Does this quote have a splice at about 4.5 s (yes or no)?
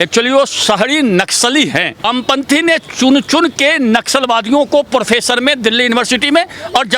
no